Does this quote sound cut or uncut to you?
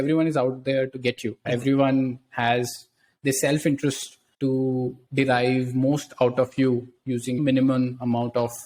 uncut